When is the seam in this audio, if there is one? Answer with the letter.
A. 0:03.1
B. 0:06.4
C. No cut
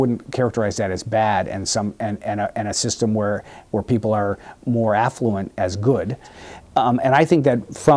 B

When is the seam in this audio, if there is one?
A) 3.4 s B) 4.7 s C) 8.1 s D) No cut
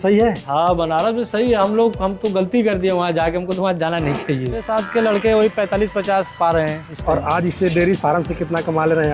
B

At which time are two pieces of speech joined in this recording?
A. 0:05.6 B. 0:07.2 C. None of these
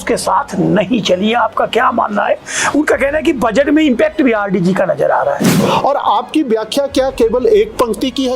A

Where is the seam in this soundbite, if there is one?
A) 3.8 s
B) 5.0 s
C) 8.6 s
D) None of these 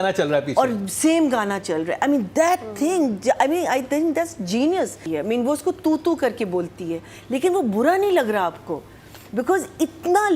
B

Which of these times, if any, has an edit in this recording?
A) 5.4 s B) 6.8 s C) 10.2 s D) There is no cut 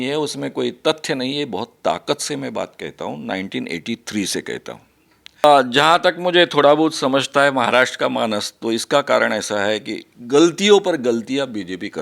A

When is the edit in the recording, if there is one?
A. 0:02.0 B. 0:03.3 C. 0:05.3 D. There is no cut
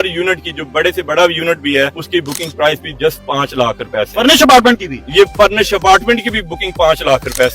A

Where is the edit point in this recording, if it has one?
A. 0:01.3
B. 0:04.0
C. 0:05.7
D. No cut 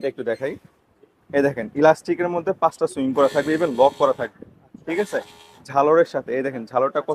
D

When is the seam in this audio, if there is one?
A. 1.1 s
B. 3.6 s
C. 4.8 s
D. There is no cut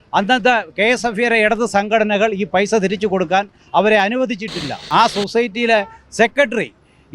C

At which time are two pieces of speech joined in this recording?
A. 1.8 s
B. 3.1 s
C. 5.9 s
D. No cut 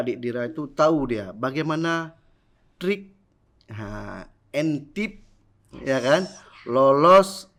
D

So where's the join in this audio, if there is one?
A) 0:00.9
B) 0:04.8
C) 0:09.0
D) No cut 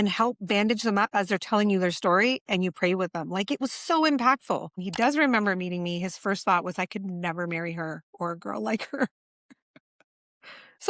B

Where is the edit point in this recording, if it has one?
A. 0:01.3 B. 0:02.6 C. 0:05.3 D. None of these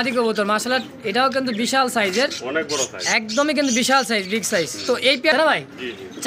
C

